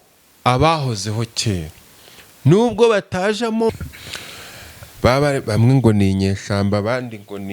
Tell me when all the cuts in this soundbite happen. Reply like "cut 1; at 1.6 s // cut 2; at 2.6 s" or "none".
cut 1; at 3.7 s